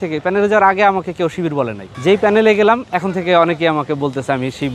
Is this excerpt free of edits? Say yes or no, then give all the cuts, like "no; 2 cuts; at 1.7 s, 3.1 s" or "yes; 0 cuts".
yes; 0 cuts